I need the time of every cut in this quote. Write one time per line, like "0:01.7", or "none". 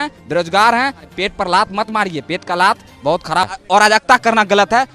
0:01.1
0:03.6